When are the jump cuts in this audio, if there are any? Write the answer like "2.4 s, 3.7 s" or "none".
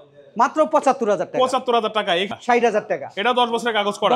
2.3 s

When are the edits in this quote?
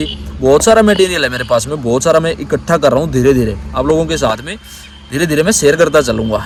none

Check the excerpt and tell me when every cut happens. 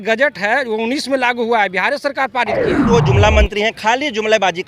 2.9 s

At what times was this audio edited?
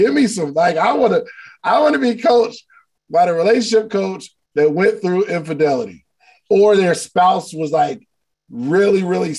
none

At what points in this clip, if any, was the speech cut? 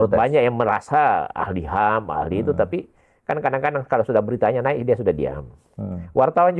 none

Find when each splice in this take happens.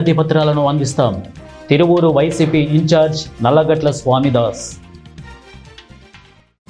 5.1 s

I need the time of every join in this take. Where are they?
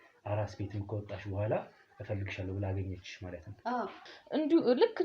4.0 s

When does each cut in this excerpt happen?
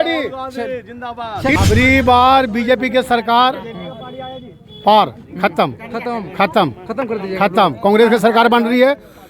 1.6 s

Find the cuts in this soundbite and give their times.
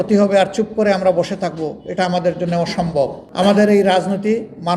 3.2 s

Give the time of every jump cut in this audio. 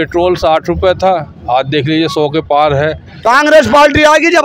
3.1 s

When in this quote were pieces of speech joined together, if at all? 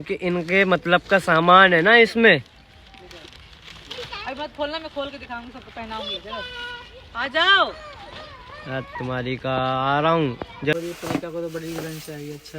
10.7 s

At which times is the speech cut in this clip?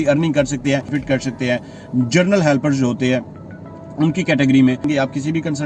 0.9 s, 4.9 s

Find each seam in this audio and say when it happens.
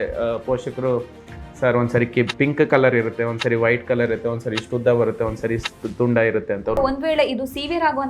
6.8 s

